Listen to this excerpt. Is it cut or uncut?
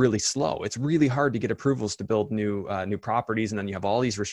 uncut